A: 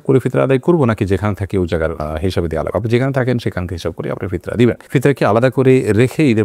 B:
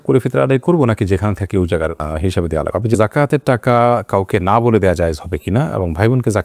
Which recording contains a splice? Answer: B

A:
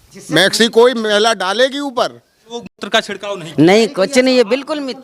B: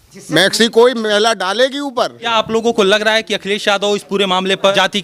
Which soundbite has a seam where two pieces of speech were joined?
A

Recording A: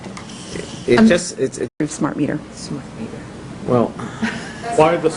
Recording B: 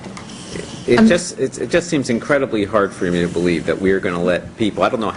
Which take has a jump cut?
B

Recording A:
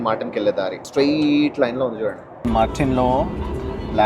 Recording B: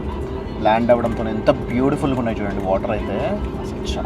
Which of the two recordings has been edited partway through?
A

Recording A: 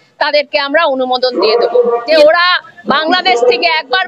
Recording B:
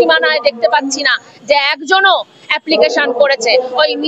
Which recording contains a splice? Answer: A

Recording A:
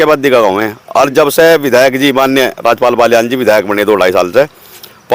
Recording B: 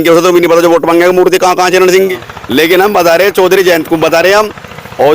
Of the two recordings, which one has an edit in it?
B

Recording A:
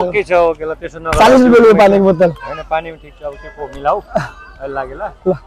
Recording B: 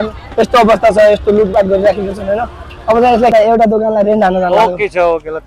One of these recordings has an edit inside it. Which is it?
B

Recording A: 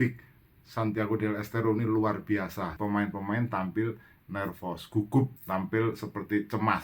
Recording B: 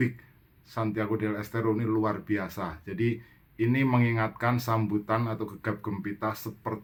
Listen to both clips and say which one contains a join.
A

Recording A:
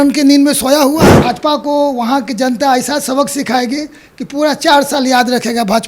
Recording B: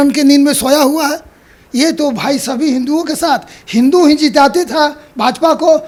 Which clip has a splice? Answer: A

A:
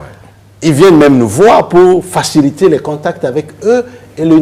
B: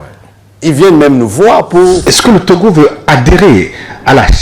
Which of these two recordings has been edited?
B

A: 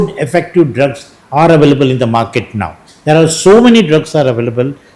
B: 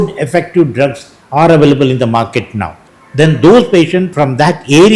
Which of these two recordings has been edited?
B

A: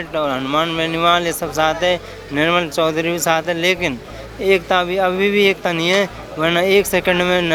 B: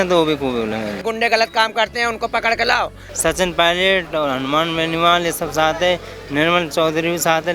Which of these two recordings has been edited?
B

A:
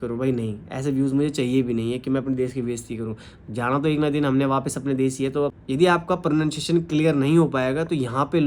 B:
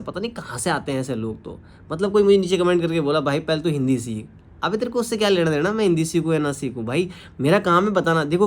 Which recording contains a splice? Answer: A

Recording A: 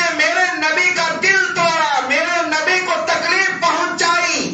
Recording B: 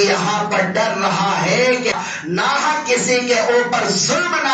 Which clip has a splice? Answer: B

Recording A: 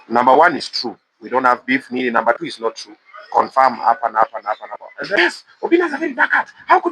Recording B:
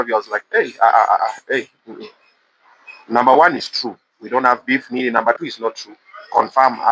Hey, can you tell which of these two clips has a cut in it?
A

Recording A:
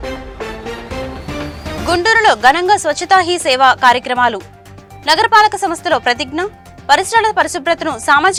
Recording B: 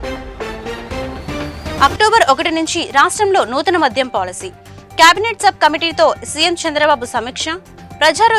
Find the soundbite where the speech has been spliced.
B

